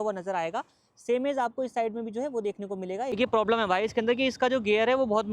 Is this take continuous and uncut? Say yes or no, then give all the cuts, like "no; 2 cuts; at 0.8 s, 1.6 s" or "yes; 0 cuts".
no; 1 cut; at 3.2 s